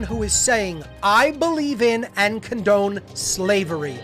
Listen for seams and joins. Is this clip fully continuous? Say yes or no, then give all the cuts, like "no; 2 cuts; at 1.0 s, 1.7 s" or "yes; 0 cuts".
yes; 0 cuts